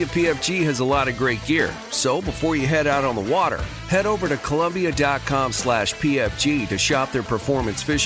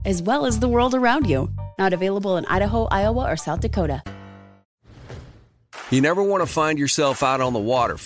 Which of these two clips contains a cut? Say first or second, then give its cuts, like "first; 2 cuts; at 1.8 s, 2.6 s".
second; 1 cut; at 4.7 s